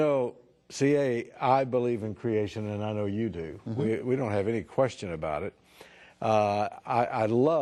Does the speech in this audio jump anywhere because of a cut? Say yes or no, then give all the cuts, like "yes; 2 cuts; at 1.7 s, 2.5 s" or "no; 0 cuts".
yes; 1 cut; at 6.5 s